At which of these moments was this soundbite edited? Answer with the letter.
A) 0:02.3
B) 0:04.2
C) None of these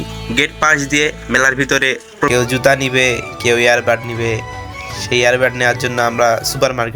A